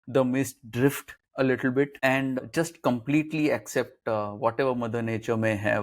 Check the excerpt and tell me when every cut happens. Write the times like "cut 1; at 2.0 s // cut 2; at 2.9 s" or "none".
cut 1; at 2.4 s